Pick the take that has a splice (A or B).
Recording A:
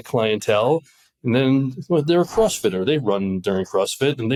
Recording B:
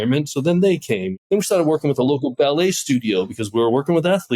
B